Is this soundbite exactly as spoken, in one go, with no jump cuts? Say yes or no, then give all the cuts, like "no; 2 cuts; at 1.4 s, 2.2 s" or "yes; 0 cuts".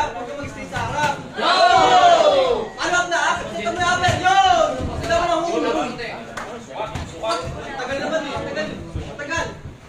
yes; 0 cuts